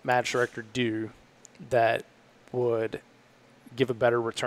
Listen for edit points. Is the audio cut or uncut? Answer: uncut